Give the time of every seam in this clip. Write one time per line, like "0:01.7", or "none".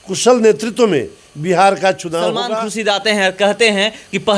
0:02.4